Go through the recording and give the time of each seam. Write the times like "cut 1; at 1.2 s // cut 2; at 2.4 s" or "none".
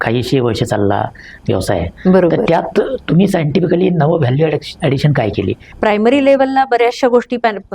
cut 1; at 5.6 s